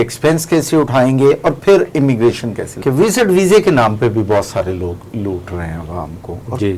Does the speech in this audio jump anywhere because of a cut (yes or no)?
yes